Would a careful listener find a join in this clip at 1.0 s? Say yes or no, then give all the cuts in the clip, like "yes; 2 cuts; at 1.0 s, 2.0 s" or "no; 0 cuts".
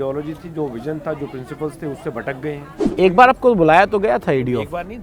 no; 1 cut; at 2.8 s